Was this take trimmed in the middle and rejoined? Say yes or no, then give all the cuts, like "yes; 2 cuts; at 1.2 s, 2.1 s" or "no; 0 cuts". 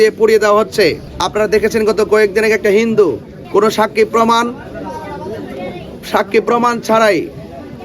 yes; 2 cuts; at 1.1 s, 3.3 s